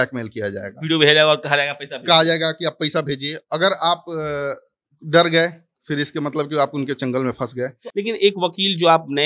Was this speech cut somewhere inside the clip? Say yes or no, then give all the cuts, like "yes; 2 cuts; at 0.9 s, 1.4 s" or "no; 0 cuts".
yes; 1 cut; at 7.8 s